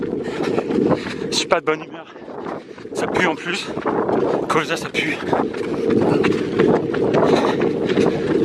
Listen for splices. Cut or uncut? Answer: uncut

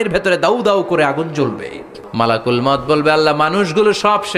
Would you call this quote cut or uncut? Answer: cut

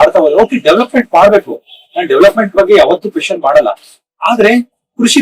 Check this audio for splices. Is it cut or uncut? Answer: uncut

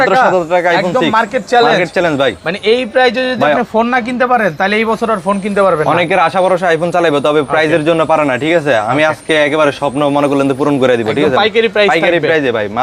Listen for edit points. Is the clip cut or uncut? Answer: uncut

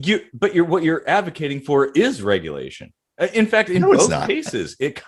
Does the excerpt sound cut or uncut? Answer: uncut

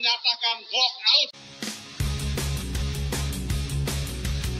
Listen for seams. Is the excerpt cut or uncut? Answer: cut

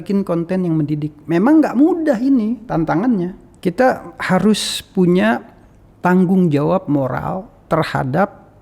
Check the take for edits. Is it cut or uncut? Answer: cut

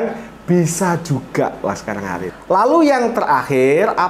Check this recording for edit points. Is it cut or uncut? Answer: cut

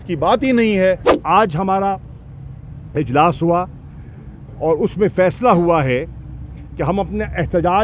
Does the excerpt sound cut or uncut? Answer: cut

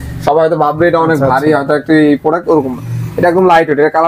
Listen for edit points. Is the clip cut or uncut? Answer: uncut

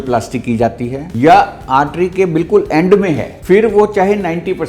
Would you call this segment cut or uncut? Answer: cut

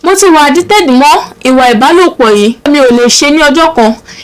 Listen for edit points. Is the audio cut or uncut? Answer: cut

